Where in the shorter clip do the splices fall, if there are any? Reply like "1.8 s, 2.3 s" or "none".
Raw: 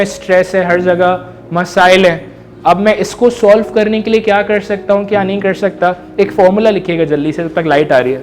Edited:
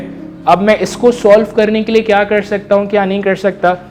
none

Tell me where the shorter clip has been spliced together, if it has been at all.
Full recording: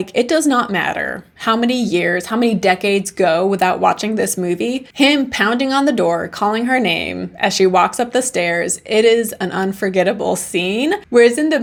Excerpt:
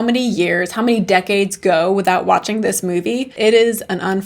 3.3 s

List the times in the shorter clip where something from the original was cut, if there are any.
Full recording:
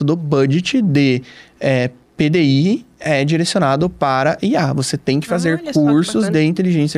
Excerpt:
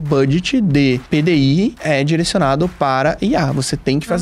1.0 s, 1.8 s

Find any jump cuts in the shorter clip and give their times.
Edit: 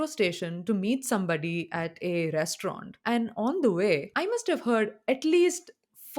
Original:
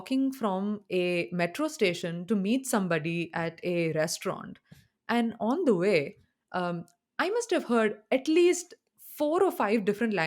2.9 s, 4.1 s

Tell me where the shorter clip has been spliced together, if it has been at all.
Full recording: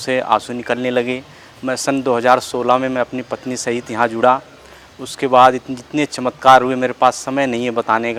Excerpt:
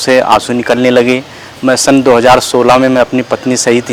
none

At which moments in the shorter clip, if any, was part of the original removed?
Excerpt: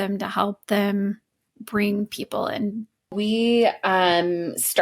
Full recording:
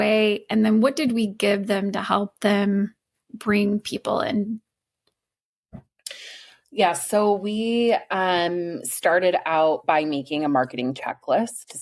3.1 s

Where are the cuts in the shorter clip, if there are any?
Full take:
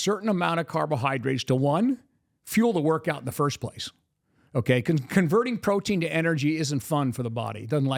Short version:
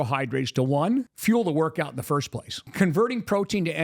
1.1 s, 2.7 s

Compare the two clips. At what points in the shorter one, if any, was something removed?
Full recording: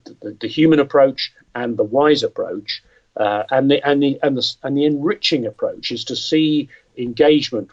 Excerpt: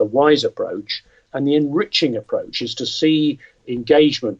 1.2 s

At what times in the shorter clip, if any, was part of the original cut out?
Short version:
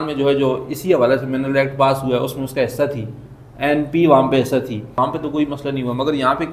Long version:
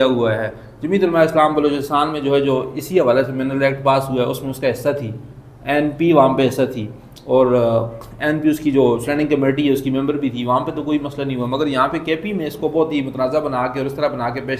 4.9 s

